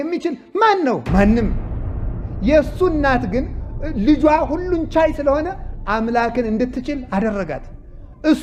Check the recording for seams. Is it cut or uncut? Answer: uncut